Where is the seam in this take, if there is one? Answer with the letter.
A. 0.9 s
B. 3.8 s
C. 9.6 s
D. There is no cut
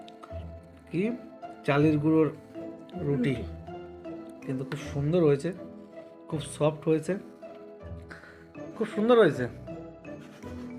A